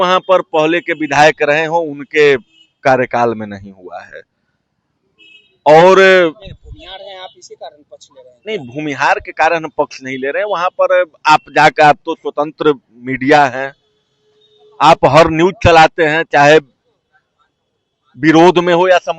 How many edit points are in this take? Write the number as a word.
zero